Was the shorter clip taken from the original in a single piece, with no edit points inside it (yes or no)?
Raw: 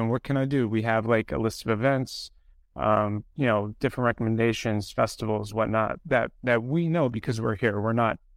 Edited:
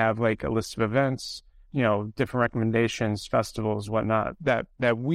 no